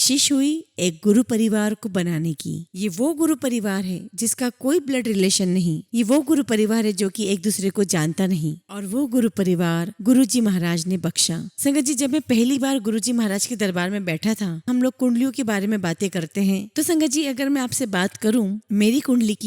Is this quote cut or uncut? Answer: cut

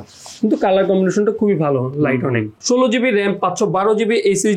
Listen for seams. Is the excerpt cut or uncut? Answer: uncut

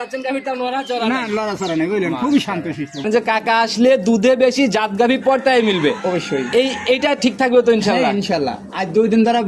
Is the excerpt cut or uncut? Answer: cut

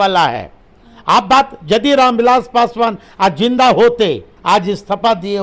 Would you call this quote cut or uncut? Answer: cut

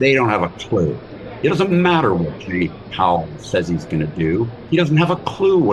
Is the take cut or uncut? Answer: uncut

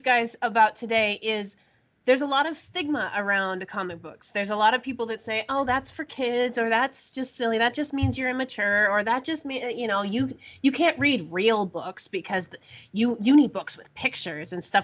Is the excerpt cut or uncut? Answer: uncut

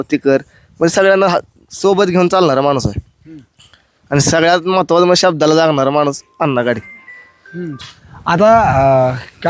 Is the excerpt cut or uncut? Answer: cut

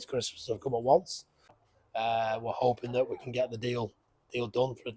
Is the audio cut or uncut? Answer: cut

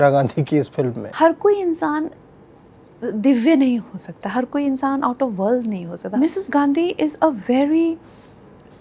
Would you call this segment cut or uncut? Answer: cut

